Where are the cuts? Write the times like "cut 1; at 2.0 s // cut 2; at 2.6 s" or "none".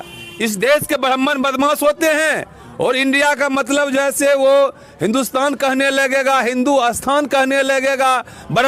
none